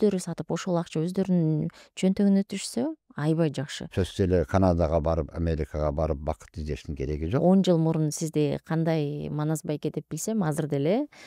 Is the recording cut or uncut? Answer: cut